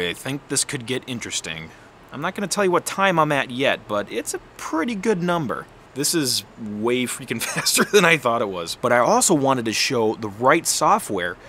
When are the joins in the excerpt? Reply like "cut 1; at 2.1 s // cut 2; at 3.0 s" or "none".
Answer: cut 1; at 5.8 s // cut 2; at 8.8 s